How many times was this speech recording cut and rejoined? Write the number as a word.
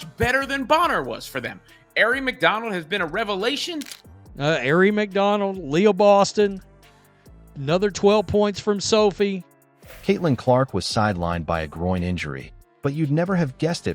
zero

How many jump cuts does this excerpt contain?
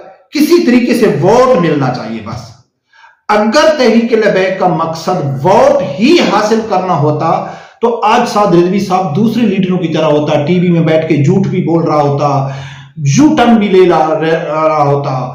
zero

